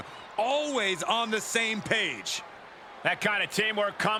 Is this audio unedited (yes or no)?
yes